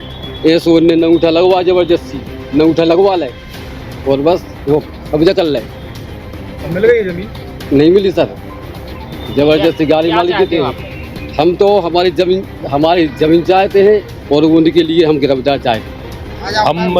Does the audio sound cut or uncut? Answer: uncut